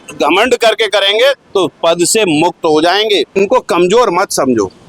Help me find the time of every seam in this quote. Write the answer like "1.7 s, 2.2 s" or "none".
3.4 s